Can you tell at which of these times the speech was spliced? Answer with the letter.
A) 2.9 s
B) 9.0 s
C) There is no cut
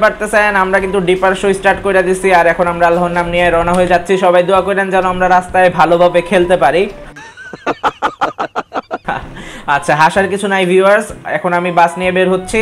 C